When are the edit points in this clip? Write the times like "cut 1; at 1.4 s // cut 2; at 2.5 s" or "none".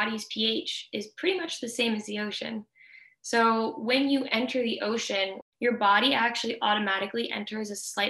cut 1; at 5.4 s

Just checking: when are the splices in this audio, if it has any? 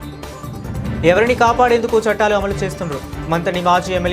cut 1; at 1.0 s

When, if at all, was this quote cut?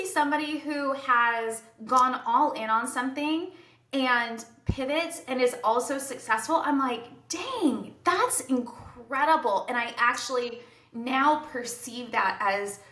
none

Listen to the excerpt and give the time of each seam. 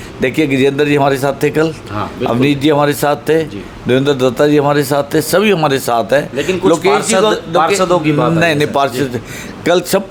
none

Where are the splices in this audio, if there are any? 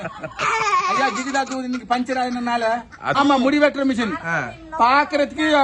cut 1; at 3.2 s

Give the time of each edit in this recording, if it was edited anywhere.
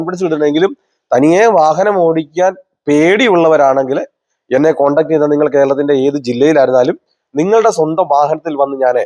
none

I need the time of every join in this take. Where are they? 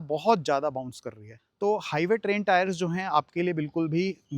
cut 1; at 1.4 s

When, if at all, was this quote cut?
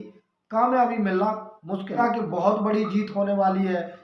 cut 1; at 2.0 s

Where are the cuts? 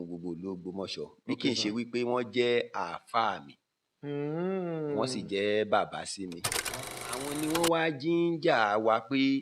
cut 1; at 6.7 s

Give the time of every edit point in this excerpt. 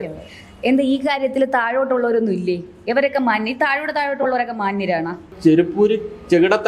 cut 1; at 5.3 s

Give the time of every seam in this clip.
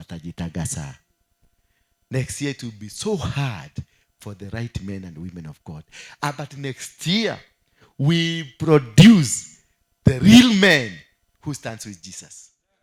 none

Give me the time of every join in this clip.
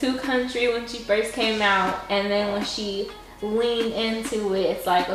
none

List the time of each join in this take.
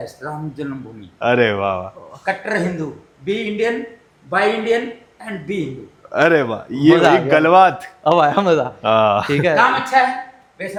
none

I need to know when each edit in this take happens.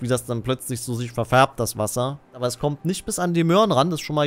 cut 1; at 2.4 s

